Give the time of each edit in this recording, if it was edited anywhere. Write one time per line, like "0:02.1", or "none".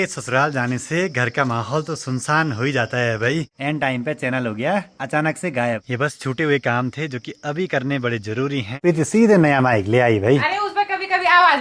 0:03.5
0:05.9
0:08.7